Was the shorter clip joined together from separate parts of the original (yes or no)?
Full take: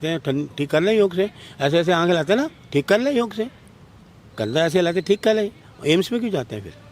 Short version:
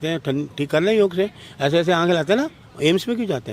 yes